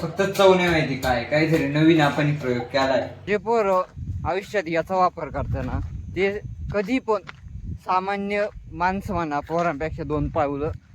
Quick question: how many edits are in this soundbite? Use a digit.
1